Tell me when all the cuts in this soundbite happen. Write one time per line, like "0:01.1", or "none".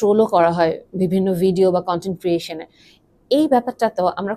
none

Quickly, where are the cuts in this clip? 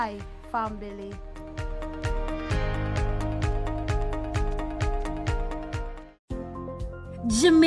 0:06.2

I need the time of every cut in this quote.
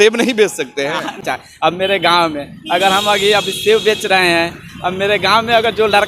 0:01.2

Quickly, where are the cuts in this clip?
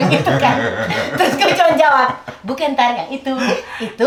none

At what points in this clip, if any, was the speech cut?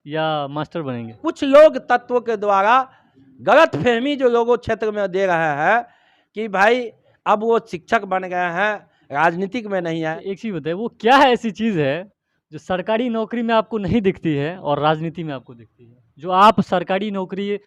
0:01.2
0:10.2

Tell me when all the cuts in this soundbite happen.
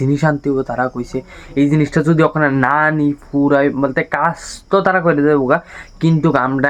none

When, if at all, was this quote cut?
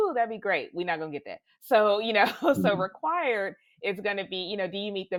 none

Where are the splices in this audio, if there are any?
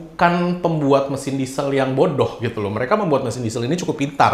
none

